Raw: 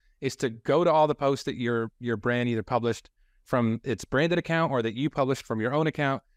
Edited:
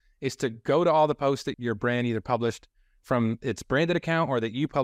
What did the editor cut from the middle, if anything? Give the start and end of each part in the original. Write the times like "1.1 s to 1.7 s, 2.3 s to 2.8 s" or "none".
1.5 s to 2.0 s